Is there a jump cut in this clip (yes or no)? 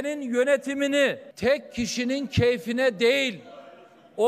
yes